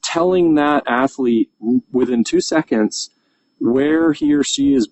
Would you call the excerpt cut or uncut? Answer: uncut